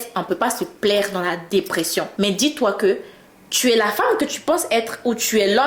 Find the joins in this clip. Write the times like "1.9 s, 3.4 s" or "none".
2.1 s